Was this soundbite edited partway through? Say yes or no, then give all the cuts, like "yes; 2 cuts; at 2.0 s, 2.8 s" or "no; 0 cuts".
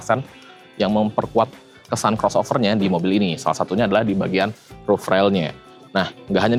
no; 0 cuts